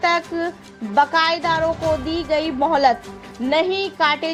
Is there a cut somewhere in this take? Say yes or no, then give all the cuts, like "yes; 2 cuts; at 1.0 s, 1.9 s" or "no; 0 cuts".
no; 0 cuts